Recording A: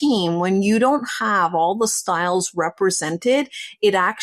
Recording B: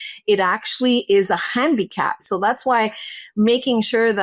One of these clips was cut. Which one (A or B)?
B